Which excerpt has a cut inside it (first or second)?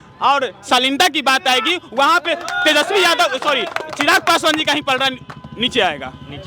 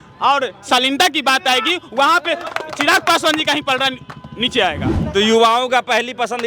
second